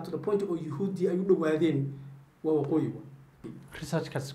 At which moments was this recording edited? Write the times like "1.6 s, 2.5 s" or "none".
3.4 s